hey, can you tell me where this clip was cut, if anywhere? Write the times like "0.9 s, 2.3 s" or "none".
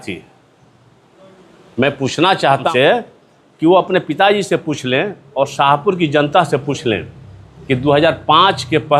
2.7 s